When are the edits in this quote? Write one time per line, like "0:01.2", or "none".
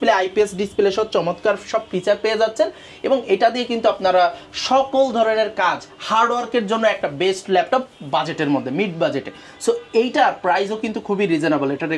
none

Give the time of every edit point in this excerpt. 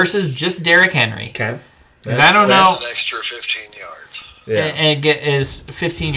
none

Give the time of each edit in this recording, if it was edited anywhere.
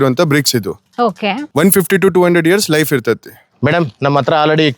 0:03.5

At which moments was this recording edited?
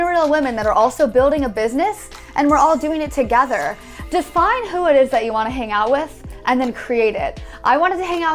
0:02.2
0:03.9

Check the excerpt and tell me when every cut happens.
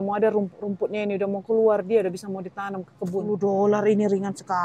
0:03.3

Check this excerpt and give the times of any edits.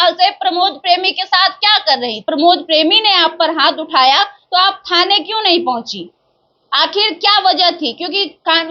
0:02.2

